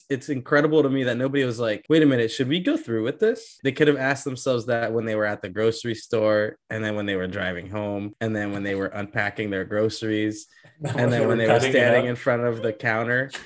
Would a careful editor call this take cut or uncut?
cut